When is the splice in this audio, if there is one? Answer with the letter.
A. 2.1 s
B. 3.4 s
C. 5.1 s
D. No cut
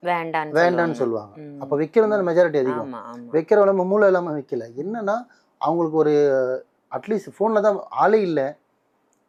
D